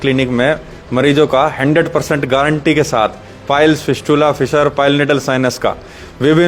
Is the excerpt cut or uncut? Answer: uncut